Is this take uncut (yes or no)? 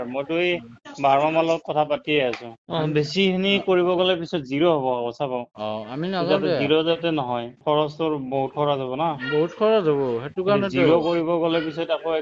no